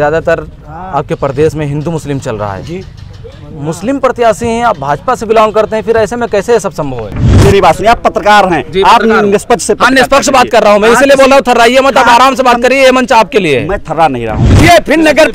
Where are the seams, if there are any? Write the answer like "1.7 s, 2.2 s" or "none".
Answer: 7.4 s, 14.5 s

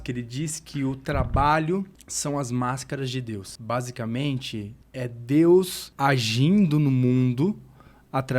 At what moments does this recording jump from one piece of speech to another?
2.0 s, 3.5 s, 4.8 s, 5.8 s

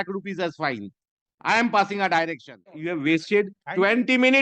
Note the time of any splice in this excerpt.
2.8 s

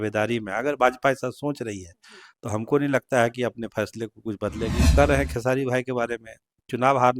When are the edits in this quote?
4.9 s

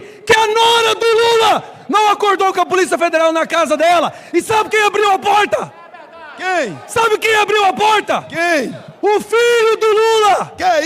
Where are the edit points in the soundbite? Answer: none

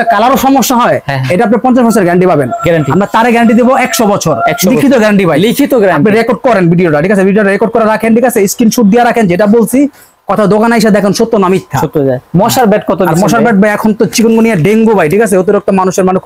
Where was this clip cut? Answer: none

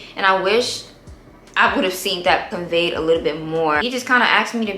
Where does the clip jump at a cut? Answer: 2.5 s, 3.8 s

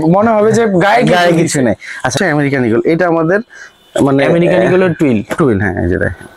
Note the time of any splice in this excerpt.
2.2 s

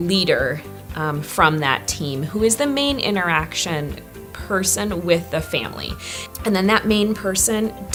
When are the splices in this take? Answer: none

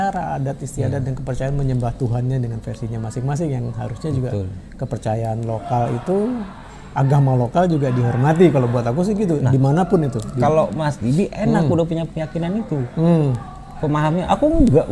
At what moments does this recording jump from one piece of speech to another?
none

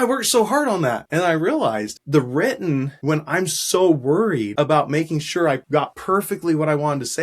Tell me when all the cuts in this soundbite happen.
1.0 s, 1.9 s, 2.9 s, 4.5 s, 5.8 s

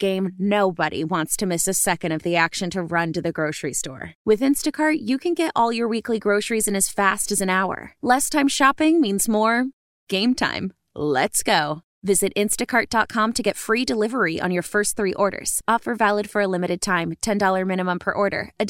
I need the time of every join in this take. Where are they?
none

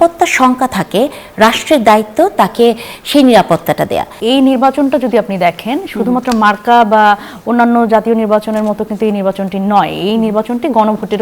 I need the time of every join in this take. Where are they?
4.2 s

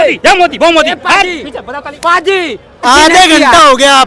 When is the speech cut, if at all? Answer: 2.9 s

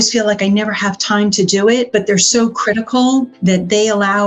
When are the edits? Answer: 1.9 s, 3.3 s

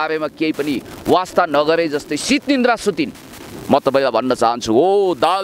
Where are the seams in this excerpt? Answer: none

